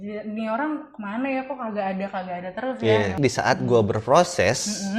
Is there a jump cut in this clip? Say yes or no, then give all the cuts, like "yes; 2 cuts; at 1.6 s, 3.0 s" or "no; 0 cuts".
yes; 1 cut; at 3.2 s